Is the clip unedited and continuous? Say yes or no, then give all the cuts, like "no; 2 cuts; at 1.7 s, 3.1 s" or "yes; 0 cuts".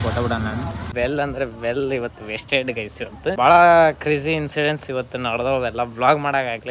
no; 2 cuts; at 0.9 s, 3.4 s